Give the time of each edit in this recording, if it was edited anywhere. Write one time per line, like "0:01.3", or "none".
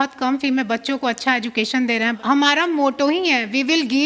0:02.2